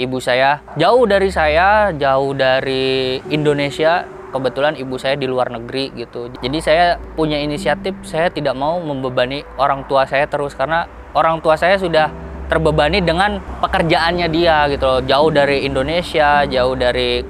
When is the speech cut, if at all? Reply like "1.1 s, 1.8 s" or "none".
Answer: none